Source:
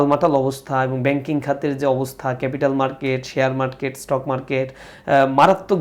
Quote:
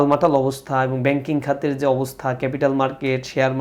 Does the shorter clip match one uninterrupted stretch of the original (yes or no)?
yes